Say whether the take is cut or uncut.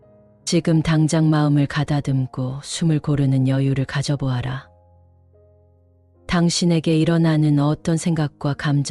uncut